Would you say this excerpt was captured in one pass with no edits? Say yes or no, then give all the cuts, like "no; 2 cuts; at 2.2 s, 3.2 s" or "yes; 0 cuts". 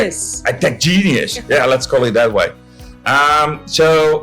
yes; 0 cuts